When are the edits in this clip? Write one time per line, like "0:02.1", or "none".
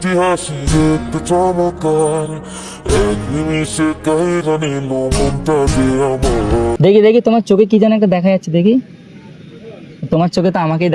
0:06.8